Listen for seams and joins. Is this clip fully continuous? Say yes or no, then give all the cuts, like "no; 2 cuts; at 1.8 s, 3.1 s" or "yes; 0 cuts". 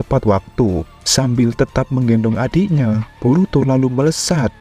no; 1 cut; at 0.9 s